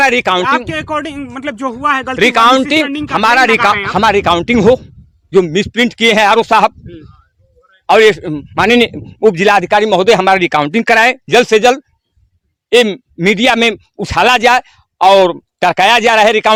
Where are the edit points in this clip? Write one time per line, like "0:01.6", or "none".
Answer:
none

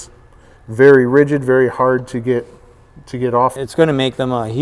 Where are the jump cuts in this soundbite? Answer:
0:03.6

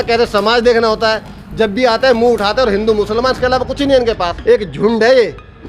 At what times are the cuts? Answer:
0:04.3

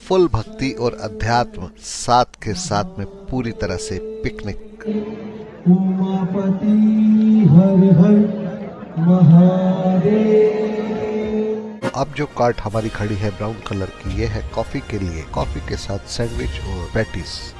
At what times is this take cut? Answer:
none

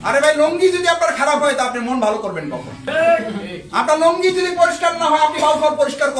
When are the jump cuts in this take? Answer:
0:02.8

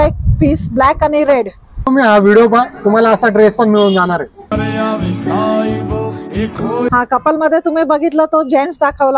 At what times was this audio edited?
0:01.8
0:04.5
0:06.9

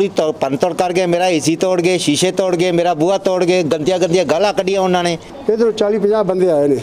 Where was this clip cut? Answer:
0:05.3

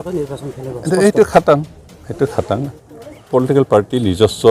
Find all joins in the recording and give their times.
0:03.2

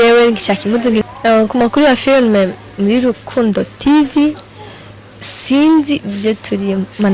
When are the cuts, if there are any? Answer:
0:01.1

